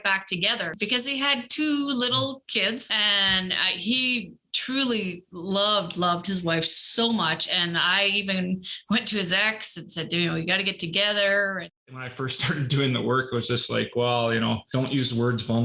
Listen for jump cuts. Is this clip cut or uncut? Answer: cut